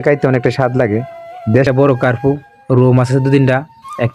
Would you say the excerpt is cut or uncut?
cut